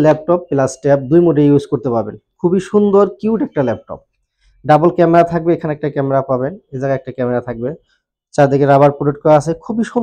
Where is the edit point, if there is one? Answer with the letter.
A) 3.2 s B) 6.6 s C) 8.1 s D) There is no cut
D